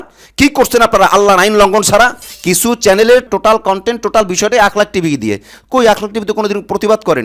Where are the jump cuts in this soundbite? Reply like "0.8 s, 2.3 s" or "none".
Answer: 2.3 s, 3.3 s